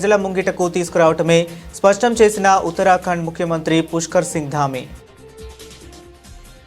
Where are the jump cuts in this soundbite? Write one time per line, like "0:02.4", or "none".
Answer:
0:05.1